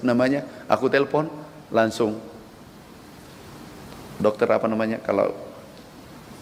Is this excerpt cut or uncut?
uncut